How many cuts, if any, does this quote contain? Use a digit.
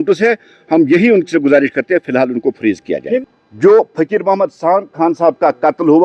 1